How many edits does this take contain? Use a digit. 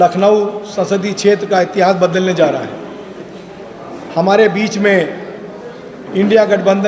0